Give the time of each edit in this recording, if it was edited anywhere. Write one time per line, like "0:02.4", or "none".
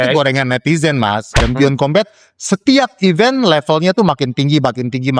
0:01.4